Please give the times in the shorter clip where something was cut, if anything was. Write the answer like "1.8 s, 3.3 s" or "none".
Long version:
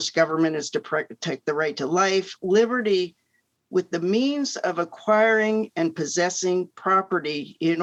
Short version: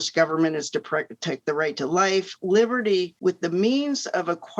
3.1 s